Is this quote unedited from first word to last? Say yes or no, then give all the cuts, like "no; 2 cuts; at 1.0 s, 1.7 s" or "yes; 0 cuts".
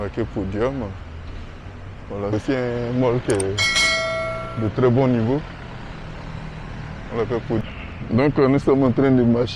no; 2 cuts; at 2.3 s, 7.6 s